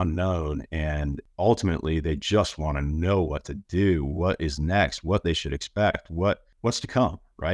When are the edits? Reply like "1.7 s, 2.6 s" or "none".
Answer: 1.2 s, 6.5 s